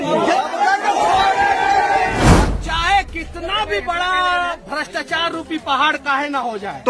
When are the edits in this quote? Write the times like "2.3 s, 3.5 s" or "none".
2.2 s